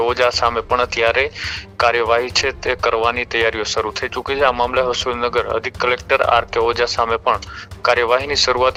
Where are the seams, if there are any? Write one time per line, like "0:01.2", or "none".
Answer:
none